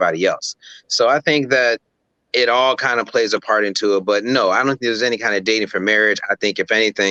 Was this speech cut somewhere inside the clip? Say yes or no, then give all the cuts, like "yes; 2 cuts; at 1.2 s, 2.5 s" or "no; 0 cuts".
no; 0 cuts